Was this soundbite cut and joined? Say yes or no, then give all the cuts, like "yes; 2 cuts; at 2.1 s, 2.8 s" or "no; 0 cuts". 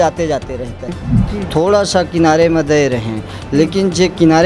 yes; 1 cut; at 1.0 s